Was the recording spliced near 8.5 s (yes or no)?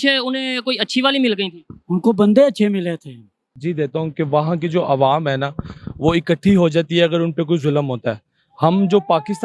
no